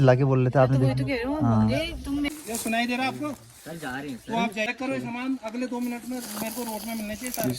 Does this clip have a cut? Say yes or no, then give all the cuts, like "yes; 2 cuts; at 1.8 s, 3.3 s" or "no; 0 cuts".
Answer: yes; 2 cuts; at 2.3 s, 4.7 s